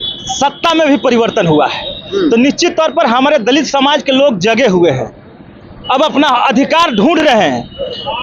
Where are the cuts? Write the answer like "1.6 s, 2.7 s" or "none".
none